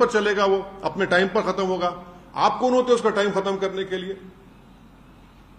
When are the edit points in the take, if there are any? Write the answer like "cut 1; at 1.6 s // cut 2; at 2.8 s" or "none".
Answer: none